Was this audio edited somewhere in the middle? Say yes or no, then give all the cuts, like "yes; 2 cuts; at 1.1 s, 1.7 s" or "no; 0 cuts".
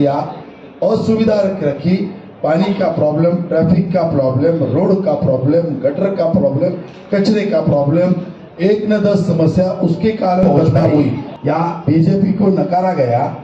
yes; 1 cut; at 11.3 s